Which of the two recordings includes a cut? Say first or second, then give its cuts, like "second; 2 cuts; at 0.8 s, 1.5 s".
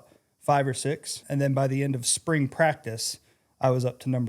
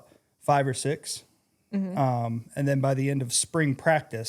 first; 1 cut; at 1.2 s